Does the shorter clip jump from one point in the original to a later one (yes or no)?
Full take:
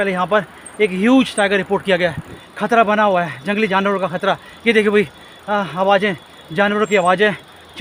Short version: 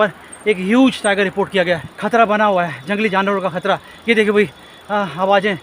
yes